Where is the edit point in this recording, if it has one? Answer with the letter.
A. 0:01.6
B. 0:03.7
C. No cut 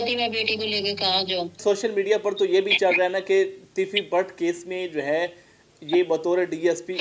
A